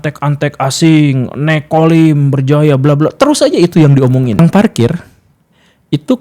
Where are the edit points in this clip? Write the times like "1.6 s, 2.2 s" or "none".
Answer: 4.4 s